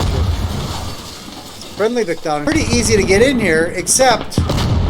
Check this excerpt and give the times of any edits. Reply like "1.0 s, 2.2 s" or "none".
2.4 s